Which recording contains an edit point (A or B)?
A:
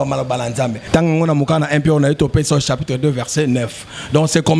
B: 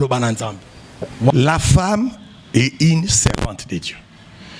B